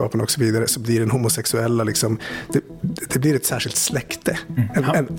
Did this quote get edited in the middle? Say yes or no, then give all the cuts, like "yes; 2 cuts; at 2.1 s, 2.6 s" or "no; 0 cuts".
no; 0 cuts